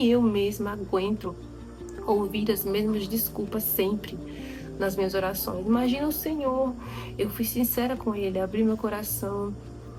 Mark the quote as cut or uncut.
uncut